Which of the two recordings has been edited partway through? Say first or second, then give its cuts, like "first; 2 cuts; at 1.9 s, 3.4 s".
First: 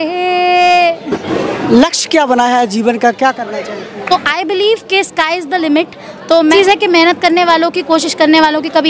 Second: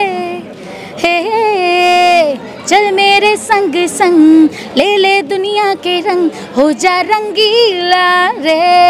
first; 3 cuts; at 1.2 s, 3.9 s, 6.5 s